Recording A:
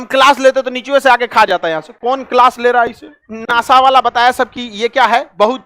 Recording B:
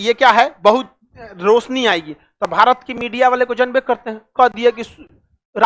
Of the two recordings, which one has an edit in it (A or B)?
A